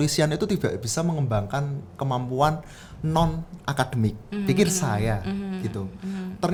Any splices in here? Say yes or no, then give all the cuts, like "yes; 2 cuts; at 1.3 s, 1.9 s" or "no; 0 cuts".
no; 0 cuts